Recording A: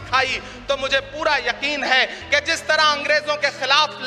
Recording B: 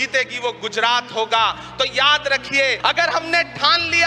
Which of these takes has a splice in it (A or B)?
B